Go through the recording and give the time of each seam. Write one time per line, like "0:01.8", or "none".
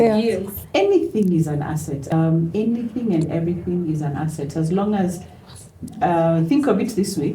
0:02.1